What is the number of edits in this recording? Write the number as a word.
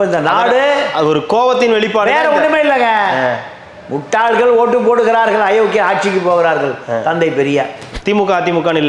one